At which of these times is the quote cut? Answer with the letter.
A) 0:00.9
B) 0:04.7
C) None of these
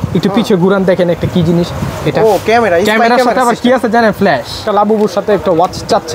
B